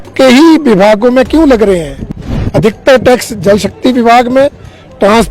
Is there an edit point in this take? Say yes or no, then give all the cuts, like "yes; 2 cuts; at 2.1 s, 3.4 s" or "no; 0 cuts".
no; 0 cuts